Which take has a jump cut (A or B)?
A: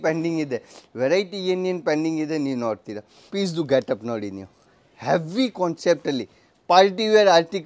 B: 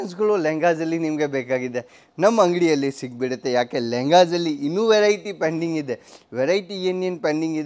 A